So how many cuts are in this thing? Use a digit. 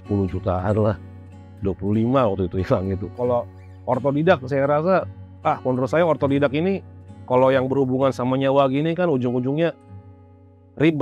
1